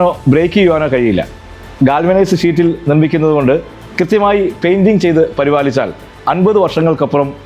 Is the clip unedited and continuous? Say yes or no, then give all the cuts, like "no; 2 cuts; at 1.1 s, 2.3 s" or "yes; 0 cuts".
yes; 0 cuts